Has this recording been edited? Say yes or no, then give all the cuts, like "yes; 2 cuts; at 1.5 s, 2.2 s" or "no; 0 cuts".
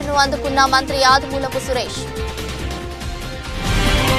yes; 1 cut; at 2.9 s